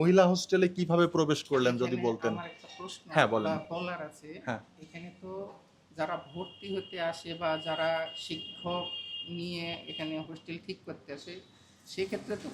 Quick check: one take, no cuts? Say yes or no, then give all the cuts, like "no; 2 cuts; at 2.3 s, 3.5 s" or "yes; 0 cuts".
yes; 0 cuts